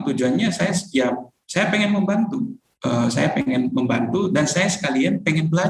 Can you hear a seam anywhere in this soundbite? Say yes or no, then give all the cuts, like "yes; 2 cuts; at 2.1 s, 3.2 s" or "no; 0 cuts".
no; 0 cuts